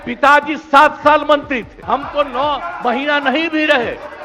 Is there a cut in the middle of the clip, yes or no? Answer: yes